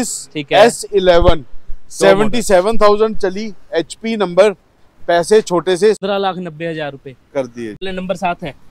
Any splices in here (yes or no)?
yes